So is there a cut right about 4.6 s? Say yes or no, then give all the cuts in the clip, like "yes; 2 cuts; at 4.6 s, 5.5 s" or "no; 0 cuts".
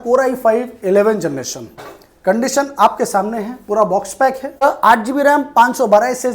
yes; 1 cut; at 4.6 s